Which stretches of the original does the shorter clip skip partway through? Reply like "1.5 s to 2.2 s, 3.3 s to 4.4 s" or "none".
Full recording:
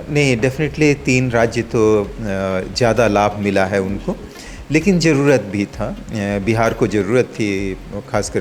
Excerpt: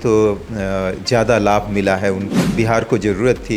4.2 s to 6.4 s